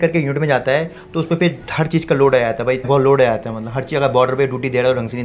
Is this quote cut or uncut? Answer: cut